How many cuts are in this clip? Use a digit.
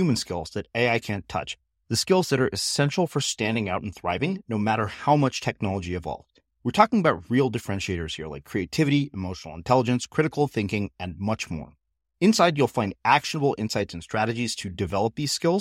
0